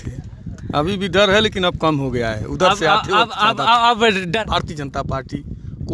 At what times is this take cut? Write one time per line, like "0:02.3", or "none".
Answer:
0:04.4